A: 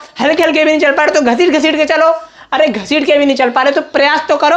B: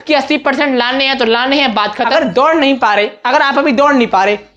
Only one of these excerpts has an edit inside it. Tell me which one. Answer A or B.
B